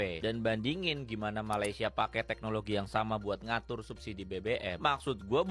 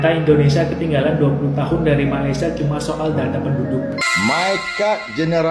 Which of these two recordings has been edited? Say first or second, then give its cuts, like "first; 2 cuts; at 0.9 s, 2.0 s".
second; 1 cut; at 3.9 s